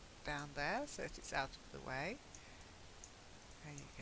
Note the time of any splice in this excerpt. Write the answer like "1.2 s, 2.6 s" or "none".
none

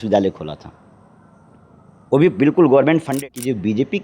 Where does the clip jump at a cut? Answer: 3.1 s

